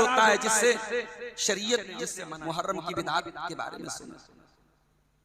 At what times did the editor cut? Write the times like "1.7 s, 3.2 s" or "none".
2.2 s